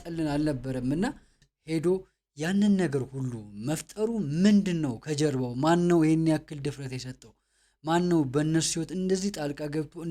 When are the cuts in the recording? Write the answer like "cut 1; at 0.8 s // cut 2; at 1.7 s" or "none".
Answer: cut 1; at 1.4 s